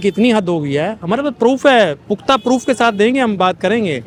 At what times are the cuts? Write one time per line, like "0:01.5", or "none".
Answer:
none